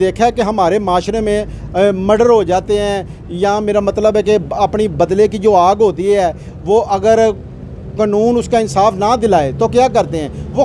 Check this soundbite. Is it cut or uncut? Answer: uncut